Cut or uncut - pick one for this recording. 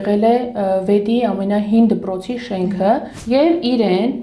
cut